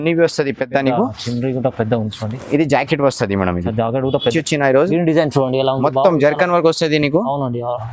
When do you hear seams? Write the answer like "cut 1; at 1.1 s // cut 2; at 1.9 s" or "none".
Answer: cut 1; at 4.3 s